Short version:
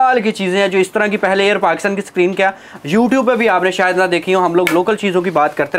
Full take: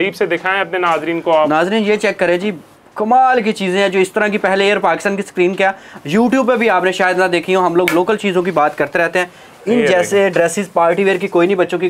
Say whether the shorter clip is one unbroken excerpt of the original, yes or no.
yes